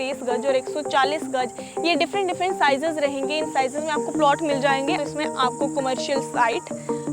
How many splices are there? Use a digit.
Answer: 1